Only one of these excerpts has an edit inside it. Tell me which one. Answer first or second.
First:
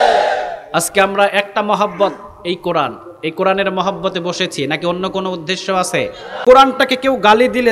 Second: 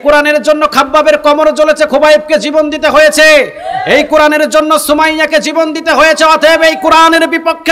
first